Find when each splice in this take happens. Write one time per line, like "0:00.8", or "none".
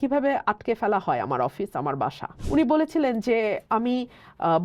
0:02.3